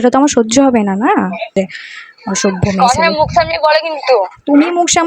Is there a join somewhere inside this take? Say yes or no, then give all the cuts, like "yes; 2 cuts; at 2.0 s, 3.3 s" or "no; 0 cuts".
yes; 1 cut; at 1.5 s